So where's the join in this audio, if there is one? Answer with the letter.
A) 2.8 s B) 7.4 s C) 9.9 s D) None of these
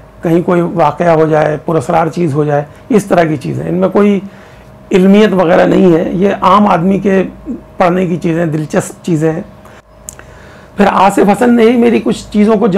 C